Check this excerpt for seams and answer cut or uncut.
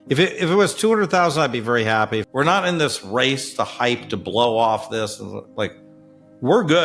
cut